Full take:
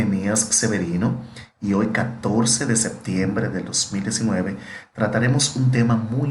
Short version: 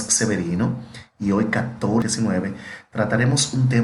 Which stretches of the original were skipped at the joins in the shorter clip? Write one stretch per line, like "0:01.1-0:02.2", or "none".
0:02.5-0:04.1